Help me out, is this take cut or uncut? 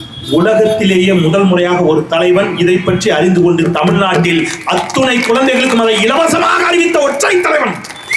uncut